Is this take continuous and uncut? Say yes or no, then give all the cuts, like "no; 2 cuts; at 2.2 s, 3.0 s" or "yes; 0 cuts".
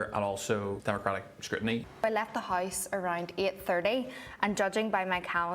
no; 1 cut; at 1.9 s